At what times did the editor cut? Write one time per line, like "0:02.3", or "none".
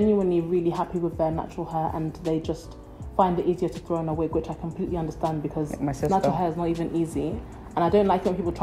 none